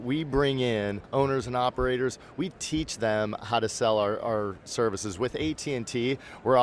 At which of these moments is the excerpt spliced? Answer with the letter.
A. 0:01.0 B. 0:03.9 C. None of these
A